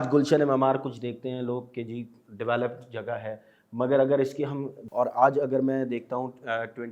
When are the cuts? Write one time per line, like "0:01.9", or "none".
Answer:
0:04.7